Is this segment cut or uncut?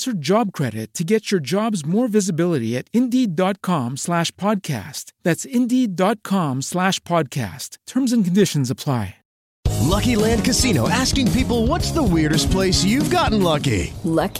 cut